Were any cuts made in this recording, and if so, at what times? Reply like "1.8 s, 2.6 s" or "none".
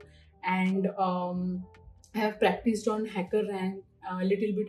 none